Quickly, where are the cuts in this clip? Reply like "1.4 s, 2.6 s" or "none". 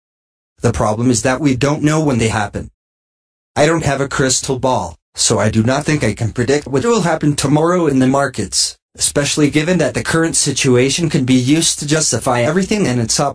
none